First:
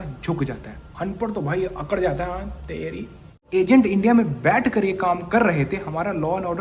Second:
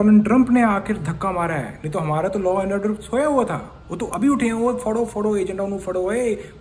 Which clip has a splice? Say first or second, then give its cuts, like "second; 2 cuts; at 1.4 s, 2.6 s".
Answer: first; 1 cut; at 3.4 s